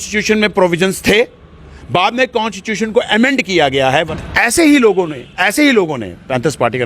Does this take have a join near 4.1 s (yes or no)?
yes